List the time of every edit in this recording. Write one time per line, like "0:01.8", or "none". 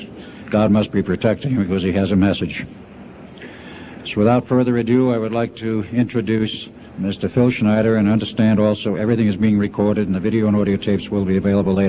0:10.2